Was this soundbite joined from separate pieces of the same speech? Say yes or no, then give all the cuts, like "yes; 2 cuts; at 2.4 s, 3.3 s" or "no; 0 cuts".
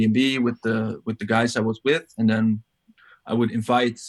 no; 0 cuts